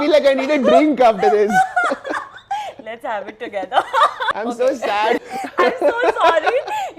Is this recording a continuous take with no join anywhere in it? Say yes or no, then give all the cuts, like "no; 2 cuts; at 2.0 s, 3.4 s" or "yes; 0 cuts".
no; 2 cuts; at 4.3 s, 5.2 s